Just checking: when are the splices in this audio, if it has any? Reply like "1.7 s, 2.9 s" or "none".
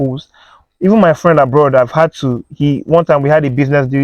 none